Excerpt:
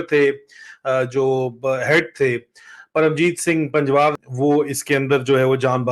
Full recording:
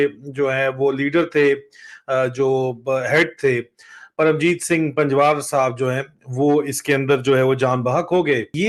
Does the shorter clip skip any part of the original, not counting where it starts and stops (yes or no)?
yes